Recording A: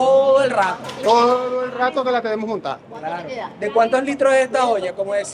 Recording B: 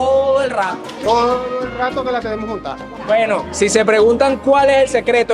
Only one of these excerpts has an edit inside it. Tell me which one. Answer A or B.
B